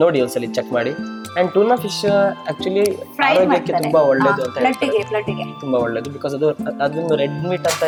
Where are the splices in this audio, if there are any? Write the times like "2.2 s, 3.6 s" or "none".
none